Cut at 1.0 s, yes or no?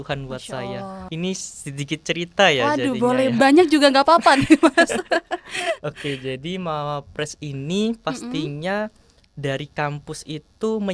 yes